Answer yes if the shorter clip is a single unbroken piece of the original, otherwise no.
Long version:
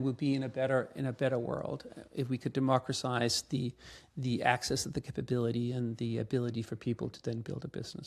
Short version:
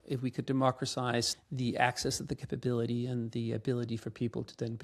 no